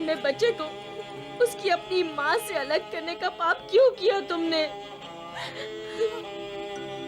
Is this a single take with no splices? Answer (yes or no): yes